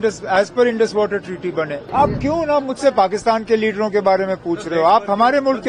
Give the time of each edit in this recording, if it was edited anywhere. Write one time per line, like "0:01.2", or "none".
0:01.8